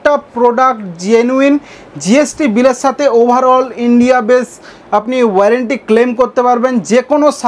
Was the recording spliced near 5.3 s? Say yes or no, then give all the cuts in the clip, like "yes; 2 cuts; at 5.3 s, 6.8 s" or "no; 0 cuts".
no; 0 cuts